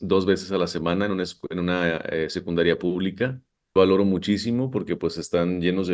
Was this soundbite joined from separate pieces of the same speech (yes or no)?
yes